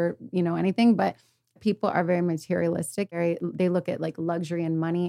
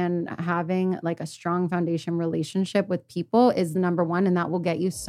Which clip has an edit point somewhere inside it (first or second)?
first